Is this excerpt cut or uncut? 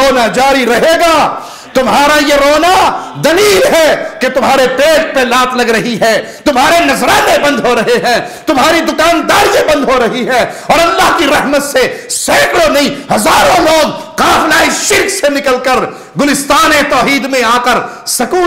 uncut